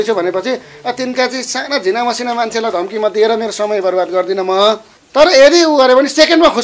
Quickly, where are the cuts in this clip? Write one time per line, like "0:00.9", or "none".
0:04.9